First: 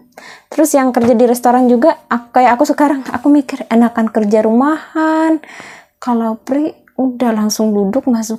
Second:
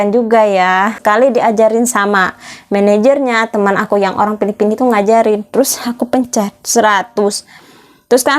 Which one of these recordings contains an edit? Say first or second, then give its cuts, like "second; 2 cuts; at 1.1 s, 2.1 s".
second; 1 cut; at 1.0 s